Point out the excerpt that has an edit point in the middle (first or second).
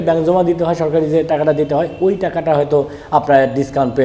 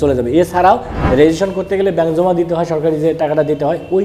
second